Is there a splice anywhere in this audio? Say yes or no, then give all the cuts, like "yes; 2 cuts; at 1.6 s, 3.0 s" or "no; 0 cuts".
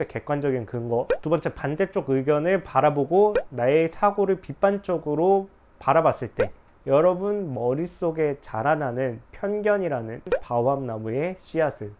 yes; 1 cut; at 10.3 s